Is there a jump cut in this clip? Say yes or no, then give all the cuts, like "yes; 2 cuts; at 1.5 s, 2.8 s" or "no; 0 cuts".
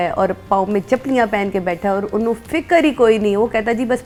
no; 0 cuts